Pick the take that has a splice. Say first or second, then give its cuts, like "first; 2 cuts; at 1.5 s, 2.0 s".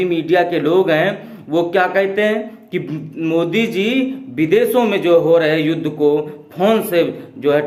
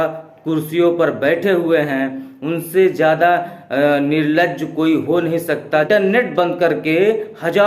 second; 1 cut; at 5.9 s